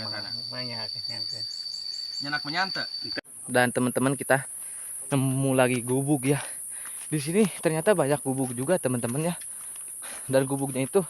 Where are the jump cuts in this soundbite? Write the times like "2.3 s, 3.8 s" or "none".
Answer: 3.4 s